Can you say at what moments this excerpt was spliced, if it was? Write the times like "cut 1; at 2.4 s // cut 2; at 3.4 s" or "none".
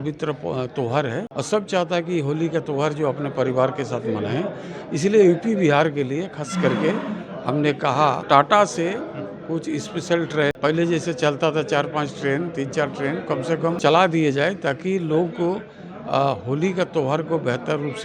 cut 1; at 1.3 s // cut 2; at 8.2 s // cut 3; at 10.5 s // cut 4; at 13.8 s